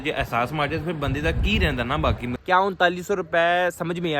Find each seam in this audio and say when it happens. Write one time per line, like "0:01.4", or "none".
0:02.4